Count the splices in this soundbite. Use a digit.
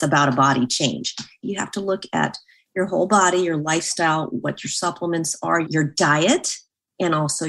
2